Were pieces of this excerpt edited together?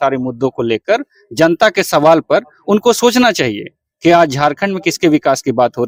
no; 0 cuts

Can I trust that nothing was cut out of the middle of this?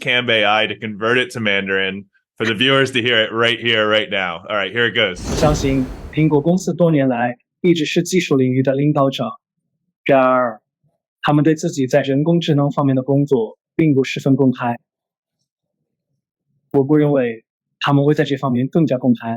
no; 1 cut; at 5.4 s

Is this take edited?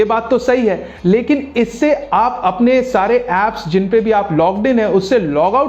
no; 0 cuts

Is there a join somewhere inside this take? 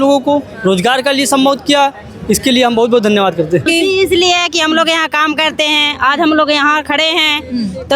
yes; 1 cut; at 3.6 s

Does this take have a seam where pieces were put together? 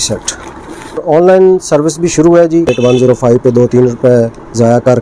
yes; 2 cuts; at 1.0 s, 2.7 s

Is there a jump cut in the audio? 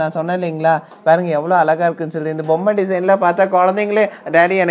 no; 0 cuts

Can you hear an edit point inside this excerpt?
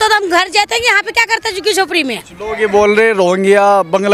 no; 0 cuts

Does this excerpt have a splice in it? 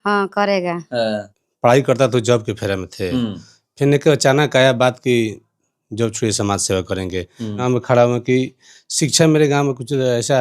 yes; 2 cuts; at 1.2 s, 7.6 s

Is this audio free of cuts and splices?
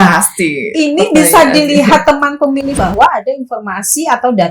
no; 1 cut; at 2.8 s

